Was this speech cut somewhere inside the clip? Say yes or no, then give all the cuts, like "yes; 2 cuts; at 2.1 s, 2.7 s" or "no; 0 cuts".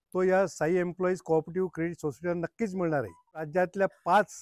yes; 1 cut; at 3.5 s